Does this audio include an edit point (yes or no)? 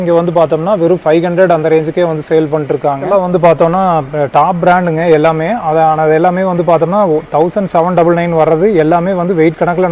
yes